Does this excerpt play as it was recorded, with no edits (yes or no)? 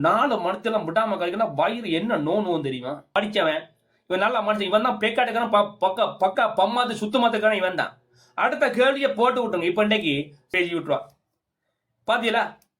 no